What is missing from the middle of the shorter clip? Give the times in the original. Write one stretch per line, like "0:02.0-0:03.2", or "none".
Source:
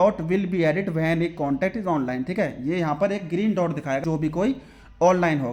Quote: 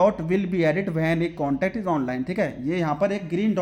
none